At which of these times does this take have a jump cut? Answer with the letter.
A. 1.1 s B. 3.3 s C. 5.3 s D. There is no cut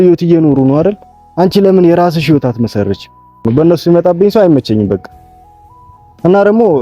B